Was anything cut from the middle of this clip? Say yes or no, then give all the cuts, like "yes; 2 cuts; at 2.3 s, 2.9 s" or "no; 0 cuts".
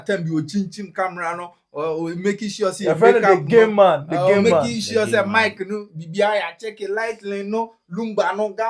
no; 0 cuts